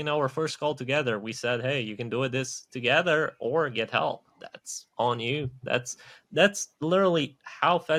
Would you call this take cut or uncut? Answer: uncut